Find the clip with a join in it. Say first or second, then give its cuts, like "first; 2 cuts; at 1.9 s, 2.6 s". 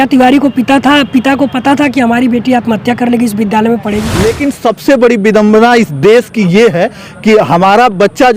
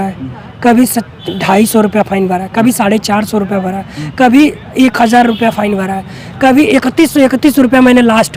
first; 1 cut; at 4.1 s